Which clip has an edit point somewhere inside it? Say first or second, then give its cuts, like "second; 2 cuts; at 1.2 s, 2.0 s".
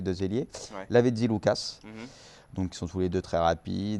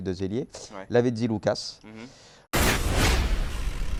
first; 1 cut; at 2.5 s